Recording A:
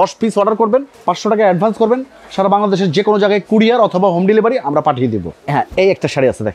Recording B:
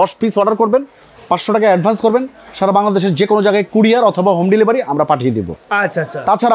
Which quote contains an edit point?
A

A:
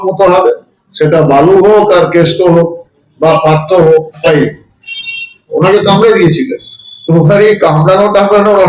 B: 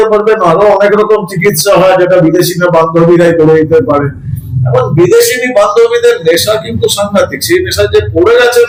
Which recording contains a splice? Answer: A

